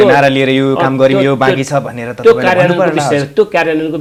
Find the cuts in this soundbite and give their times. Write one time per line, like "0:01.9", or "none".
none